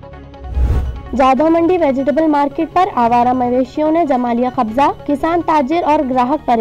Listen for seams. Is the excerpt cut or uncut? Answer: cut